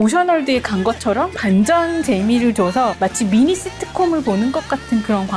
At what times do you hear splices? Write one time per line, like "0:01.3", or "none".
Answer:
0:01.3